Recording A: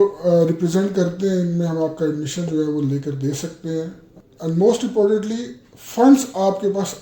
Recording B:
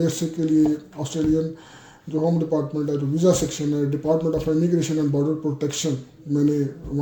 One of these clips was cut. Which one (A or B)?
A